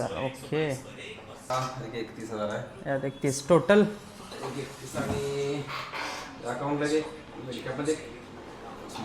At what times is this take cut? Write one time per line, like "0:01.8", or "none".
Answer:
0:01.5